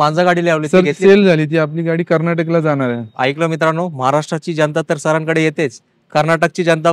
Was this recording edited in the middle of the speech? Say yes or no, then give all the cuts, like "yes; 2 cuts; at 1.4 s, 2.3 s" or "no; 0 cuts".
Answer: no; 0 cuts